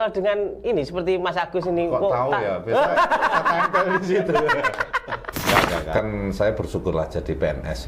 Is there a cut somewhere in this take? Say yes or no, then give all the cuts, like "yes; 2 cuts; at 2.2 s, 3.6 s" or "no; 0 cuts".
yes; 1 cut; at 5.9 s